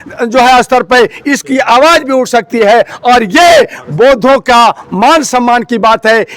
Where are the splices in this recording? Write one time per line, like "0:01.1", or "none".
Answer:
none